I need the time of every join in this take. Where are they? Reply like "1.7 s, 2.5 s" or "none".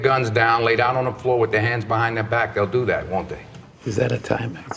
3.3 s